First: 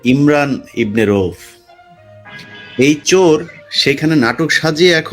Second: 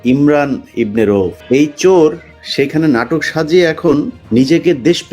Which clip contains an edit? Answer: second; 2 cuts; at 1.4 s, 4.2 s

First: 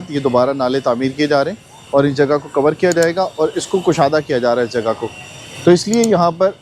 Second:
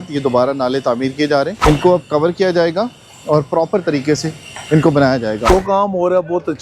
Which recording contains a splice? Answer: second; 2 cuts; at 1.5 s, 5.5 s

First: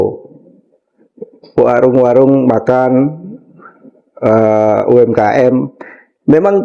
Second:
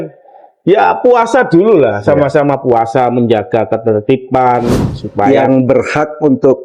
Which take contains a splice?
second; 1 cut; at 5.3 s

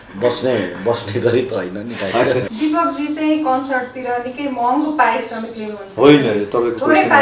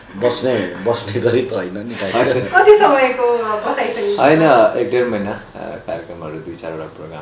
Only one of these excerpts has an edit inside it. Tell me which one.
first; 1 cut; at 2.5 s

